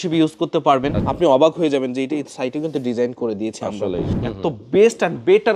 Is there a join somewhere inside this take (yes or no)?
yes